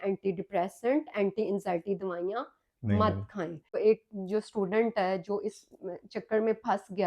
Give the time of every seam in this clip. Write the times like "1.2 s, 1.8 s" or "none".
3.8 s